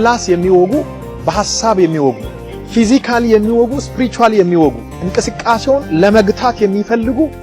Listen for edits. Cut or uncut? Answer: uncut